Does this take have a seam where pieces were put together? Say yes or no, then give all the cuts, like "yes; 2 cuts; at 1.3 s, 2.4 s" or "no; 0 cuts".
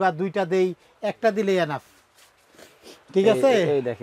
no; 0 cuts